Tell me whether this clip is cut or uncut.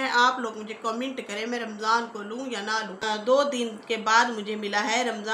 cut